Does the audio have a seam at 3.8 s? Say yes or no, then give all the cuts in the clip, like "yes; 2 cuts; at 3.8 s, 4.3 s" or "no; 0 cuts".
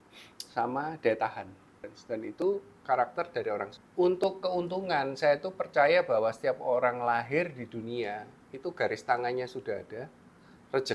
yes; 2 cuts; at 1.9 s, 3.8 s